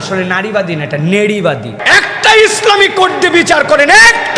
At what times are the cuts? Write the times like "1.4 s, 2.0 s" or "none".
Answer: 1.7 s